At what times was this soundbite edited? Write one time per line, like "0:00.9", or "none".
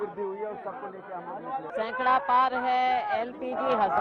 0:01.7

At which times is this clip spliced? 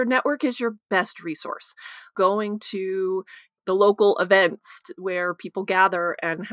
none

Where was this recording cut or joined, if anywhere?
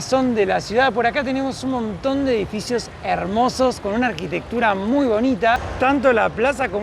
none

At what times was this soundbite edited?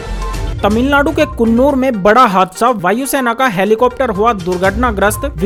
none

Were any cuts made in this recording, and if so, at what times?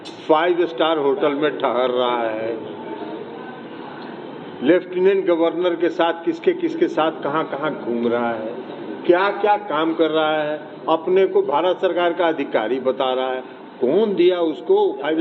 none

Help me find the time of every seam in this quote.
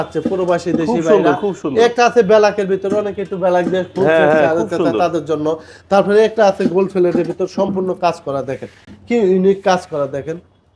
none

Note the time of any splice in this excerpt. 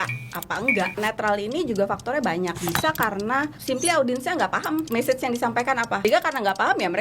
0:01.0
0:02.6
0:03.6
0:04.9
0:06.0

